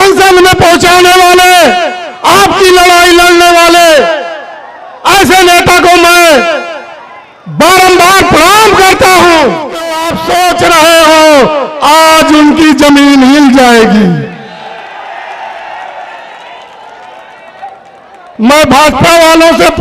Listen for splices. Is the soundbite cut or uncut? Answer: cut